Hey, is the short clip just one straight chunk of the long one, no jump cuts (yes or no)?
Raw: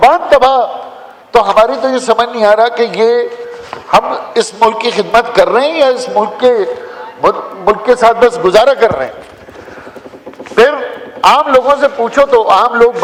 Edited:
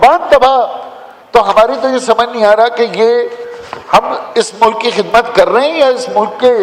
yes